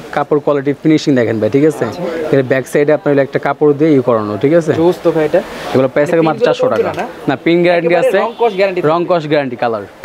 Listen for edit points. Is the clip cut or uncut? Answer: uncut